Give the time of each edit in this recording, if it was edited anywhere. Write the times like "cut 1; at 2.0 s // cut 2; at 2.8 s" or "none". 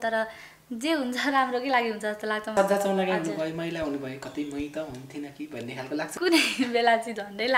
cut 1; at 2.5 s // cut 2; at 6.2 s